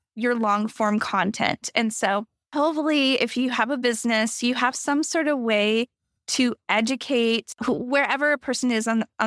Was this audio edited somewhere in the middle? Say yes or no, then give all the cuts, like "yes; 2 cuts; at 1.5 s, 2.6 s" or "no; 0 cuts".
yes; 2 cuts; at 2.4 s, 7.5 s